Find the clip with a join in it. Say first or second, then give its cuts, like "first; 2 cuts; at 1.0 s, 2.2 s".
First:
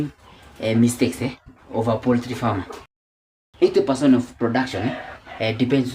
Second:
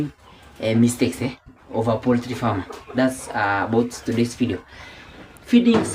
first; 1 cut; at 2.9 s